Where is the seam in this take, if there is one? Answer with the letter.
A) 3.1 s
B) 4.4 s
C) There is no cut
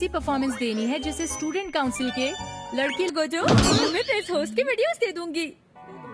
A